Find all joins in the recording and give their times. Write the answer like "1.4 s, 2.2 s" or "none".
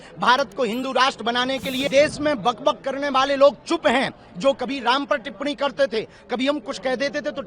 1.9 s